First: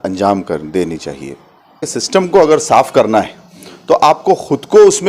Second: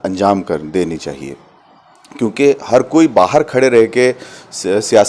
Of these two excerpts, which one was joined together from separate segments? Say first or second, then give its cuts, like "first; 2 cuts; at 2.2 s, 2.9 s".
first; 1 cut; at 1.9 s